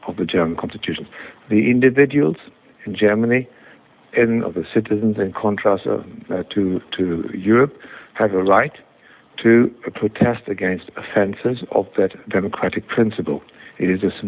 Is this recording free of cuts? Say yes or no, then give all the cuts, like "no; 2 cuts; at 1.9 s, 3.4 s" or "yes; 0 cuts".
yes; 0 cuts